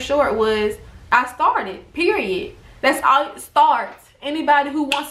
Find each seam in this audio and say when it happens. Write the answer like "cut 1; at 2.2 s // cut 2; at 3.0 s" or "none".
cut 1; at 0.9 s